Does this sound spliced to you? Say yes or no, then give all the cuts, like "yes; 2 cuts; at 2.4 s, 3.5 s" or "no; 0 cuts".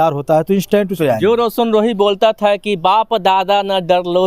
yes; 1 cut; at 0.9 s